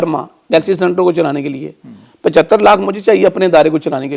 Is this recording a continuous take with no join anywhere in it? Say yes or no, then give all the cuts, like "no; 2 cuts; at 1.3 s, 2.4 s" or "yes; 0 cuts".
yes; 0 cuts